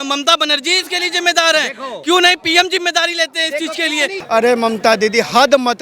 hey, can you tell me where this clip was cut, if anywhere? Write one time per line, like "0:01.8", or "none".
0:04.1